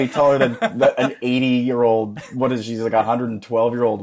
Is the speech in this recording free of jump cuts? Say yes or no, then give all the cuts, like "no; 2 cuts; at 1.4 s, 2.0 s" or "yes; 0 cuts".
yes; 0 cuts